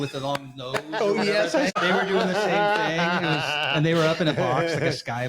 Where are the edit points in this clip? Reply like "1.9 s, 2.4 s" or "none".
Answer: 1.7 s